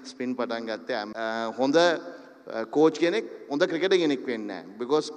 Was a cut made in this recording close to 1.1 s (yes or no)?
yes